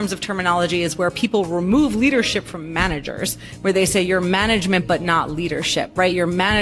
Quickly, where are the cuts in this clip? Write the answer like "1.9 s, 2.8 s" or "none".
none